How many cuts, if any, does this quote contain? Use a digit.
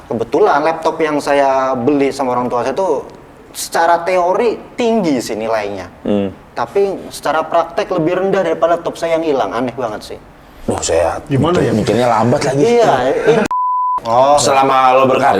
1